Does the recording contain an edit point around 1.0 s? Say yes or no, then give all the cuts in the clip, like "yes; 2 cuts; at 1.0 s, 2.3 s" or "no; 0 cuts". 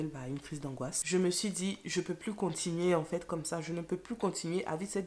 yes; 1 cut; at 1.0 s